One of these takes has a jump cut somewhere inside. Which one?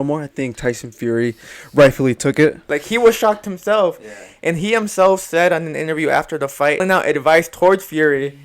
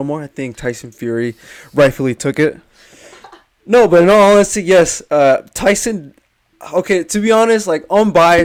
first; 2 cuts; at 2.7 s, 6.8 s

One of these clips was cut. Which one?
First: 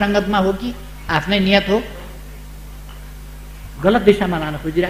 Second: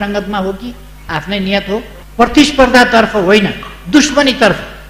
second; 1 cut; at 2.0 s

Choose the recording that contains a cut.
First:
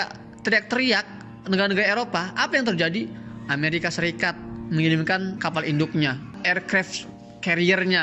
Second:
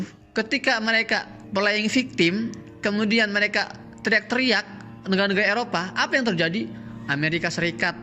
first; 1 cut; at 5.4 s

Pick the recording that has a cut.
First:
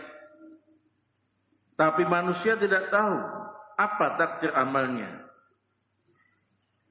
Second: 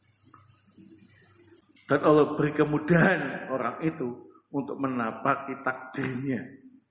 second; 1 cut; at 1.6 s

